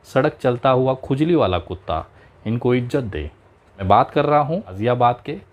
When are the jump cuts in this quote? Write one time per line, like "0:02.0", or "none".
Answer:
0:03.9
0:04.8